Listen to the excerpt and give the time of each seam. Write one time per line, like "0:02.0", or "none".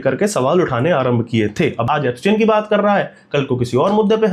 0:01.8